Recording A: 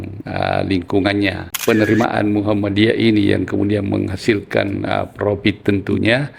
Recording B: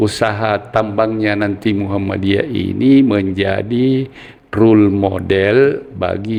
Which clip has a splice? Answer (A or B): A